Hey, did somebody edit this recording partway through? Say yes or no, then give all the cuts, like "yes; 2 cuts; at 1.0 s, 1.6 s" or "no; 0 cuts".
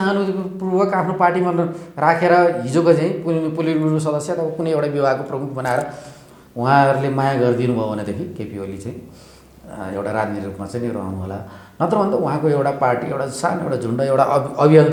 no; 0 cuts